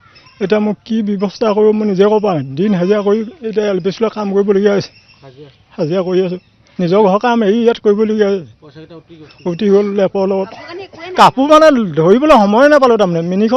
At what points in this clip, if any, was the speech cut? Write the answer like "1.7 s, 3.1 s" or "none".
none